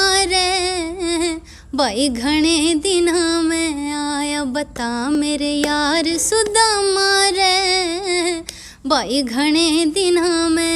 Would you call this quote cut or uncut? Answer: uncut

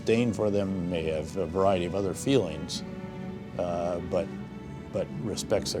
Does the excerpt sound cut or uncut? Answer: uncut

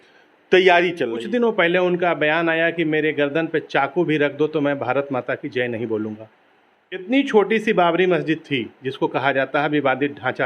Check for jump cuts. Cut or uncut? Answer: cut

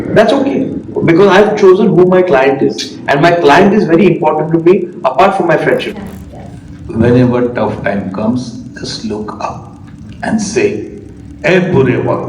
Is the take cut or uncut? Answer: cut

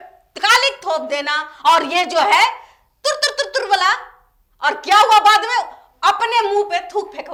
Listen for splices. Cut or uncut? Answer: uncut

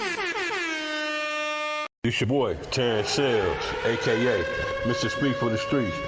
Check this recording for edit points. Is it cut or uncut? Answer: cut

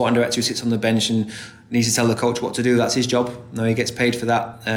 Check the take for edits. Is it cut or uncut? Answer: uncut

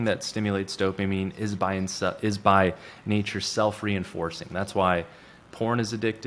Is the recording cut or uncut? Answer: uncut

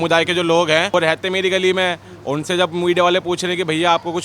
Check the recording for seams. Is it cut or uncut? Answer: cut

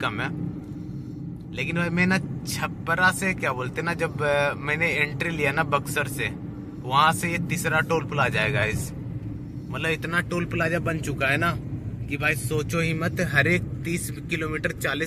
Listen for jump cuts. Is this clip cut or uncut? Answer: uncut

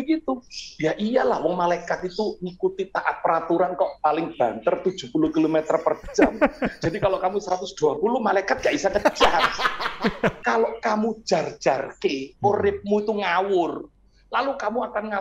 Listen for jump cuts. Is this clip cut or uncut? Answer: cut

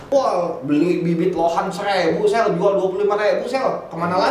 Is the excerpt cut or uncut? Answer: uncut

